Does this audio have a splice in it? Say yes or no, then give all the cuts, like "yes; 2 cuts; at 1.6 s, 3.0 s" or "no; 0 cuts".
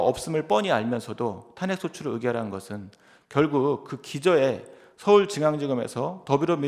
no; 0 cuts